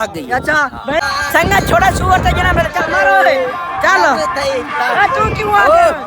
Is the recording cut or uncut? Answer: cut